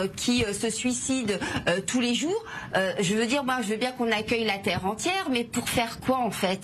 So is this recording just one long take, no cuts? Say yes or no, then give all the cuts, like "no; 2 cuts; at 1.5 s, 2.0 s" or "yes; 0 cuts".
yes; 0 cuts